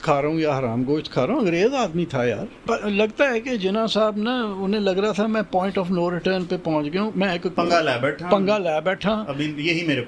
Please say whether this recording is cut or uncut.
cut